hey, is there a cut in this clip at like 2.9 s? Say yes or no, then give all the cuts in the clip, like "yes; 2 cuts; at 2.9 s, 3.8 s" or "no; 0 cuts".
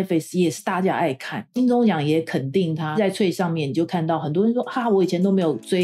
yes; 2 cuts; at 1.4 s, 2.9 s